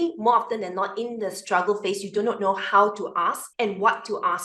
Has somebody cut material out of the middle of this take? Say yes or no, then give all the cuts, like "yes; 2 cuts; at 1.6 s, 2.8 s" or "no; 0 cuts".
yes; 1 cut; at 3.4 s